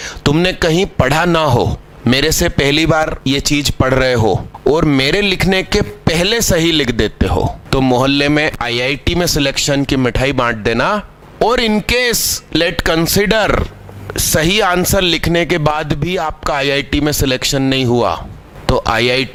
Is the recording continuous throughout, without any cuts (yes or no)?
yes